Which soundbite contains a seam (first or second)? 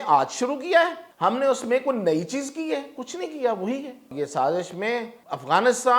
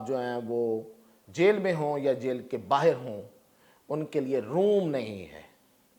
first